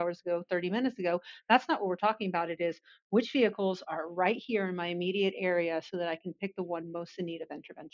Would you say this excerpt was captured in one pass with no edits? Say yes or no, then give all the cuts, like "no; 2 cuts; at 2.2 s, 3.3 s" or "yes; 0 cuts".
yes; 0 cuts